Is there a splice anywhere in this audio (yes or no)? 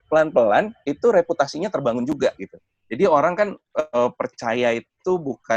no